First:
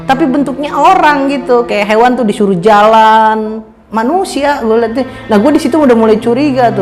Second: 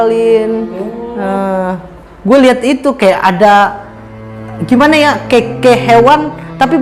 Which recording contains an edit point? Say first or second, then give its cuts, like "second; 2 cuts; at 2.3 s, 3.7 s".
first; 1 cut; at 3.8 s